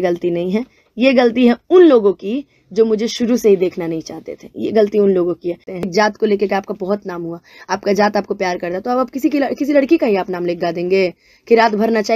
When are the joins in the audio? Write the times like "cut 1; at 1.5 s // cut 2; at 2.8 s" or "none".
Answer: cut 1; at 5.9 s